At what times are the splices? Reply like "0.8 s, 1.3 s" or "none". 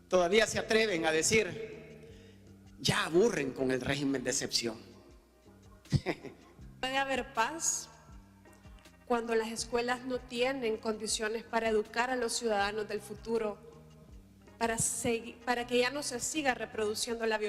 6.8 s